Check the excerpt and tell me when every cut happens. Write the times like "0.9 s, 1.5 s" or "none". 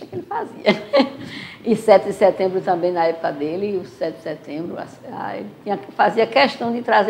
none